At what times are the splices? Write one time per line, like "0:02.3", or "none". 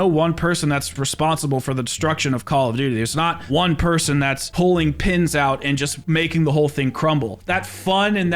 0:01.0
0:04.5
0:07.4